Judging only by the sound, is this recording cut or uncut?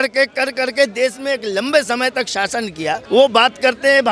cut